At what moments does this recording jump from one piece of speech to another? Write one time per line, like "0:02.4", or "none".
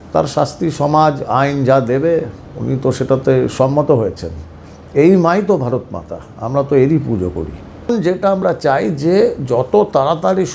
0:07.9